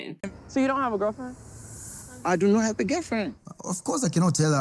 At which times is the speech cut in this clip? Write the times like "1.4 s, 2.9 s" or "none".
none